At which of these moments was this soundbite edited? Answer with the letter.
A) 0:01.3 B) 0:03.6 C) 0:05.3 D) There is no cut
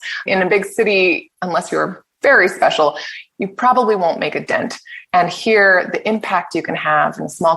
A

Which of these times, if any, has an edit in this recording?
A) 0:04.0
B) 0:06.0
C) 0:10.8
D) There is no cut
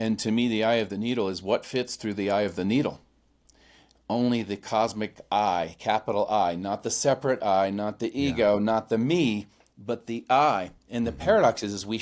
C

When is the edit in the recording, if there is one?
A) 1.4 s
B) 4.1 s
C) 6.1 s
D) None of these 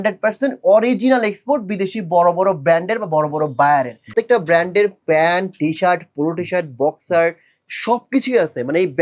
B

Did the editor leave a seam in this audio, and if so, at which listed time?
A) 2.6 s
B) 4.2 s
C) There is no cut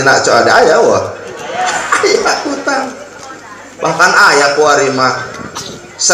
C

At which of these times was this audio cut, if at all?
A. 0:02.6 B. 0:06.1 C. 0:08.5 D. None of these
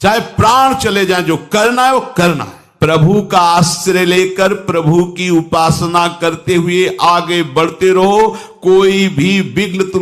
A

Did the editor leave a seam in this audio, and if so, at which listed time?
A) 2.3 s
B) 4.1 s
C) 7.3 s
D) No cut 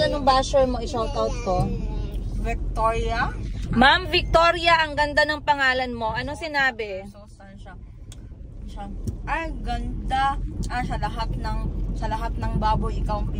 D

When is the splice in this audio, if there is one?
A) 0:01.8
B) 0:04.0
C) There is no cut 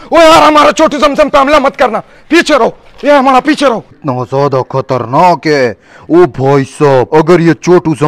B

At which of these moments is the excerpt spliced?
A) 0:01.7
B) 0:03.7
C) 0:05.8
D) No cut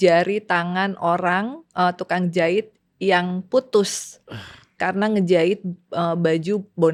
D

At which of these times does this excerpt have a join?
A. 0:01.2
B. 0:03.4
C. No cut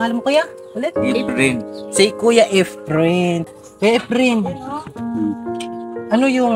B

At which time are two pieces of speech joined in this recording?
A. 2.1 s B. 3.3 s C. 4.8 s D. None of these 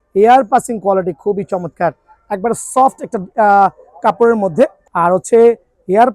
C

